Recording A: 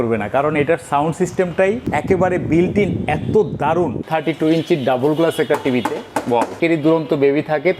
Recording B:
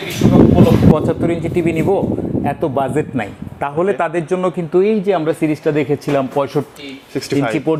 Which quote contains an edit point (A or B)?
A